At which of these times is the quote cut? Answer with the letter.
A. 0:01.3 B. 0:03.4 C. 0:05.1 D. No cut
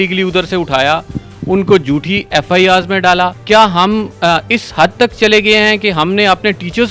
B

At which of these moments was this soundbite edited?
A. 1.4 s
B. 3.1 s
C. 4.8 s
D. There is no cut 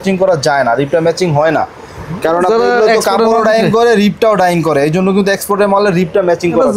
D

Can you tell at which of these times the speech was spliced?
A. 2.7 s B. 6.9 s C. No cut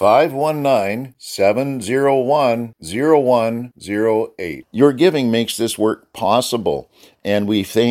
C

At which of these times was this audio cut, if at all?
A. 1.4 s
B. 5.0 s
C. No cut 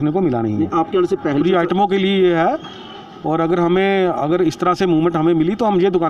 A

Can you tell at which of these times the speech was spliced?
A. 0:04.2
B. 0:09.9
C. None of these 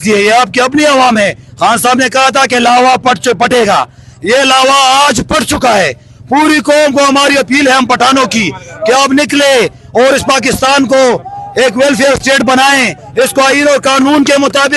C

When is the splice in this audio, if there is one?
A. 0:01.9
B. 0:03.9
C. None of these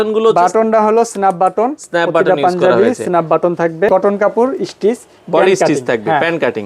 B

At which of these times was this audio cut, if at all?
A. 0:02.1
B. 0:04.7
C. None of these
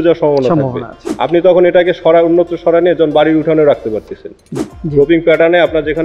B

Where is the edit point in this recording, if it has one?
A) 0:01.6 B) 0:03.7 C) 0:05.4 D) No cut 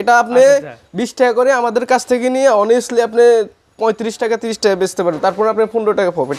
D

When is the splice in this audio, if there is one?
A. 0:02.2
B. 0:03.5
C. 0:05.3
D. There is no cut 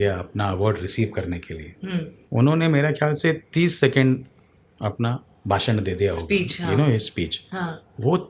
A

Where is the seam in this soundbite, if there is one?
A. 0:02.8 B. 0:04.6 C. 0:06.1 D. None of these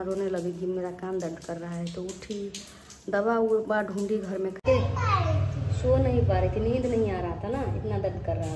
B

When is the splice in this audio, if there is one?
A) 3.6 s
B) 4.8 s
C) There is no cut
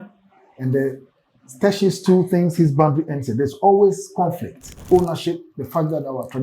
B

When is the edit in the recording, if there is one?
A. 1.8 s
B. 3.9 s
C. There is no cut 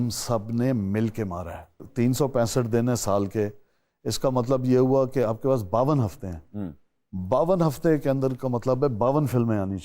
A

